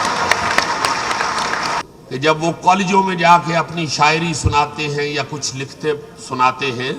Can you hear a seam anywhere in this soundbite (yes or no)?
yes